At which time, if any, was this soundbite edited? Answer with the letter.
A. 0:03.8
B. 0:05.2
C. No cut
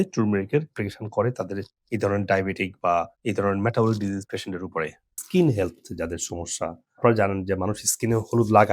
B